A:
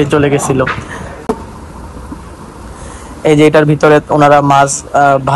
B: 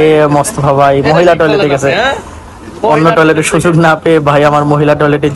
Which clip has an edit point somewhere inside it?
A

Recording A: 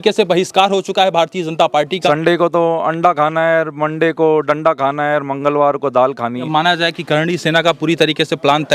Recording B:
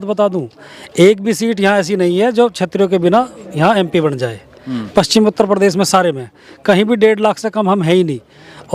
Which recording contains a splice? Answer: A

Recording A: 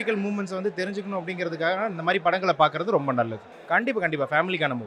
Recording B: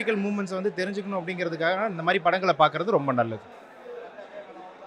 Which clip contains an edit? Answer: A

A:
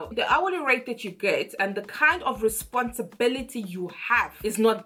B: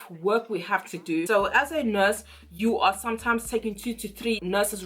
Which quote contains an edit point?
B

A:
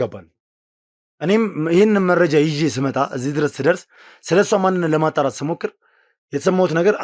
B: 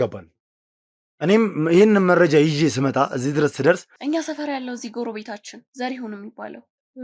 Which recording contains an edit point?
B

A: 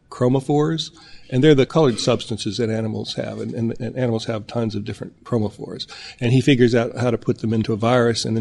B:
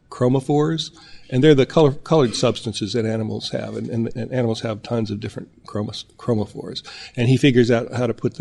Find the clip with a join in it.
A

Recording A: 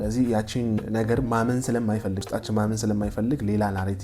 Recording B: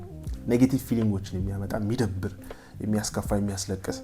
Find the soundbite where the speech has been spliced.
A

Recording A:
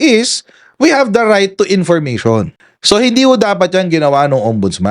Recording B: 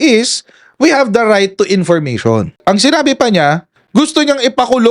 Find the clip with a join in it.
B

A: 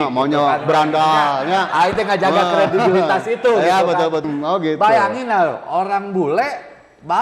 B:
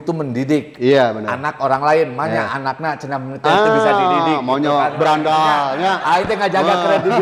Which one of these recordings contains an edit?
A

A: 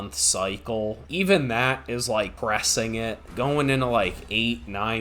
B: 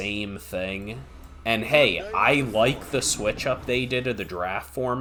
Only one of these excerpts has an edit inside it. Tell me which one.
A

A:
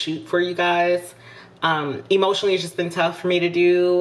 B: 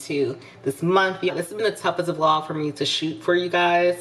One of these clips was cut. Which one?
B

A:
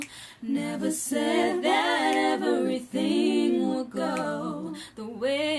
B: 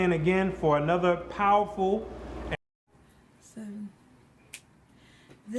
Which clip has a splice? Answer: B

